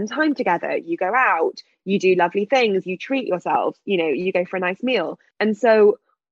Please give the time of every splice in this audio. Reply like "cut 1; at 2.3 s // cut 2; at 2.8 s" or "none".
cut 1; at 5.2 s